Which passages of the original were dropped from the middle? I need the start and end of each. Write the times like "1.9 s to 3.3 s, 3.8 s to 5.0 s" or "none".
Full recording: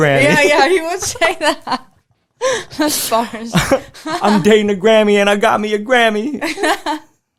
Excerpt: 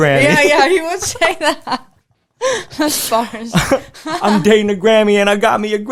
none